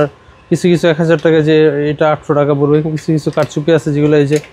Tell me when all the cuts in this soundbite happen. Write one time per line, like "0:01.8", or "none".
none

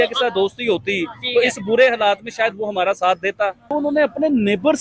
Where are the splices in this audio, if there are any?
0:03.6

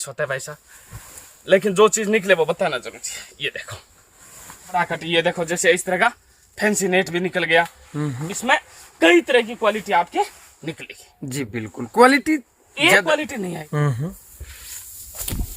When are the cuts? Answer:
0:04.7
0:13.6

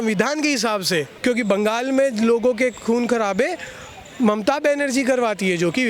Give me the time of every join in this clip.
0:01.1

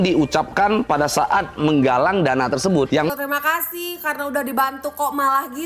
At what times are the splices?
0:03.1

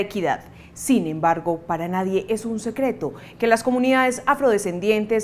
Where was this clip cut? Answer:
none

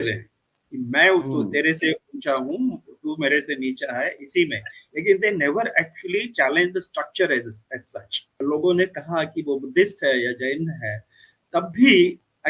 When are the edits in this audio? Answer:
0:08.4

